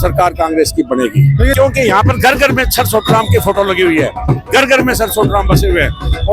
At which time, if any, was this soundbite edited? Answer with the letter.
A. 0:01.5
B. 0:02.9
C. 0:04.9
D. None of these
A